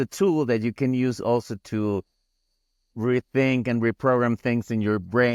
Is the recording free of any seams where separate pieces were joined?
yes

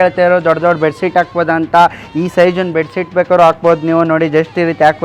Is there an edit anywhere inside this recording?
no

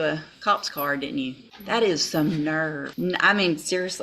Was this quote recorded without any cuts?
no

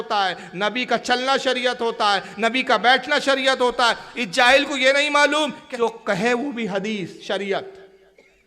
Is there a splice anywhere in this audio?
yes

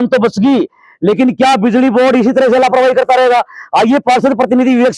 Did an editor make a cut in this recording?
no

